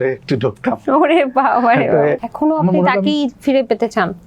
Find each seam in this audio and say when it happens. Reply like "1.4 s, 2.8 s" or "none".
2.2 s